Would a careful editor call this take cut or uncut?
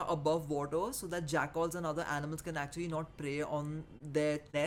uncut